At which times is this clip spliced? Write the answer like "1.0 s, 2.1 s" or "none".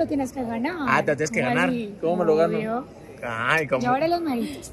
none